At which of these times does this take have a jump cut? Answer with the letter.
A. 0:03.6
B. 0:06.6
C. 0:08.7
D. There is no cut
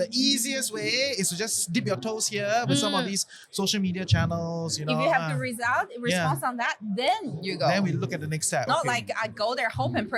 C